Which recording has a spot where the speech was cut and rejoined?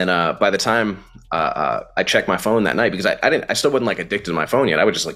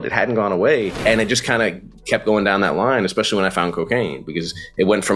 second; 1 cut; at 0.9 s

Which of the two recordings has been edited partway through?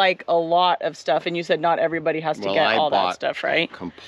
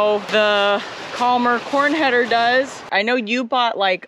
second; 1 cut; at 2.8 s

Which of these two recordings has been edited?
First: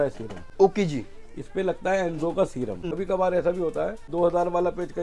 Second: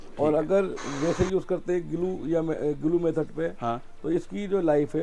first; 2 cuts; at 2.8 s, 4.0 s

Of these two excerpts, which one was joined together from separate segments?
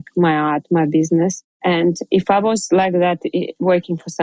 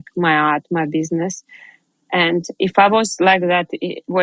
first; 1 cut; at 1.5 s

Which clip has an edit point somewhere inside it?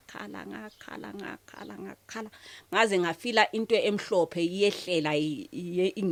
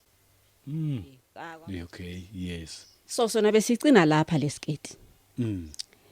second; 1 cut; at 1.2 s

